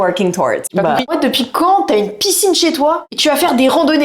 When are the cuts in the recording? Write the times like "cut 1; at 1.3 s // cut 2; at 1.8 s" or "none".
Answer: cut 1; at 0.7 s // cut 2; at 3.1 s